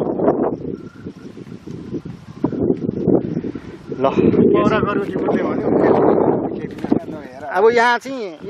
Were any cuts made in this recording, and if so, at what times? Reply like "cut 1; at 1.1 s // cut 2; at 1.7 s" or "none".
none